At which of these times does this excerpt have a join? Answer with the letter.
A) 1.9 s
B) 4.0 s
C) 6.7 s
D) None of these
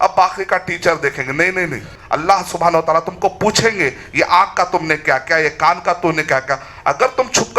A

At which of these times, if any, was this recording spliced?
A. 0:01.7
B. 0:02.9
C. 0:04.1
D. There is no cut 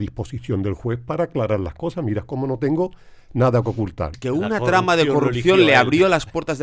C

